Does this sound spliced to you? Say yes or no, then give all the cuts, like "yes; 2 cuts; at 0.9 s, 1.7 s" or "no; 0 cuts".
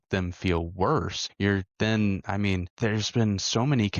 yes; 2 cuts; at 1.2 s, 2.7 s